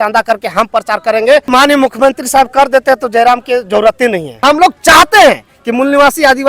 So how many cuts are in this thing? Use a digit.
2